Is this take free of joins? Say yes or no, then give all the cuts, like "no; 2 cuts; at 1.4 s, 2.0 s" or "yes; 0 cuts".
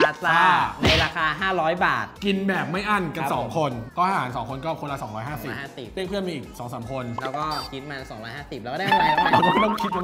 yes; 0 cuts